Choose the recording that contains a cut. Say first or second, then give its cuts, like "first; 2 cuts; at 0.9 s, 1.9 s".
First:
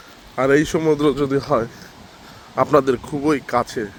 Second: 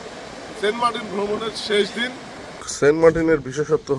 second; 1 cut; at 2.8 s